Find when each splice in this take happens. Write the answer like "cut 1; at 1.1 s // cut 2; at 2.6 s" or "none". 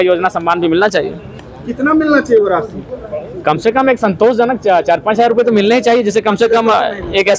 none